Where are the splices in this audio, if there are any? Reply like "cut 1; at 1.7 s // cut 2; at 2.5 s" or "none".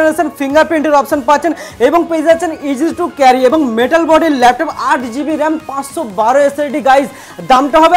none